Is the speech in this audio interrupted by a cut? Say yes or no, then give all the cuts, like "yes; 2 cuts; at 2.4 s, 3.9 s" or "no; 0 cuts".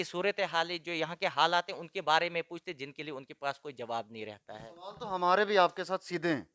no; 0 cuts